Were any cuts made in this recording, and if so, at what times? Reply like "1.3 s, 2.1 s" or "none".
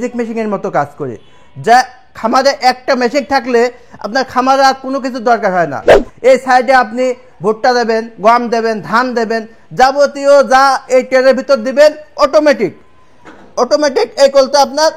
6.0 s